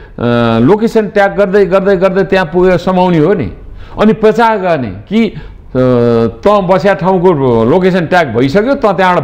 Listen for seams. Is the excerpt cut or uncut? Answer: uncut